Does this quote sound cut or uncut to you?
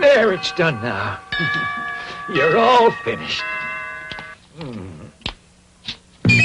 uncut